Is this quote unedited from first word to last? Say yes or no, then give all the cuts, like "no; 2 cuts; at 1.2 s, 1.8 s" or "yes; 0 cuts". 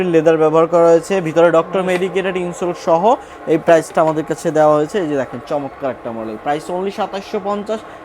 yes; 0 cuts